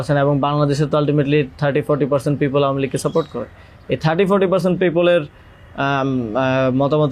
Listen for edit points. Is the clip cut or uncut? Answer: uncut